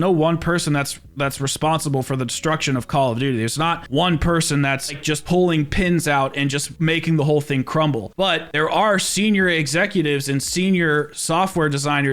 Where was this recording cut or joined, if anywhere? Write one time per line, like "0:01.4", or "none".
none